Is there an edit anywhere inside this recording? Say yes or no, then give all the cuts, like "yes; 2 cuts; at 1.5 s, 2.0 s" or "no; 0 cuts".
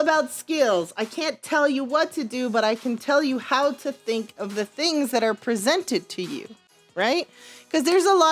no; 0 cuts